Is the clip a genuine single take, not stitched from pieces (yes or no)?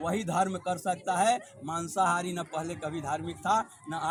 yes